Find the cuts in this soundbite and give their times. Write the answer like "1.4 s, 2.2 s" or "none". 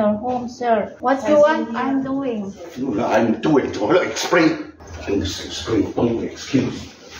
0.9 s, 4.8 s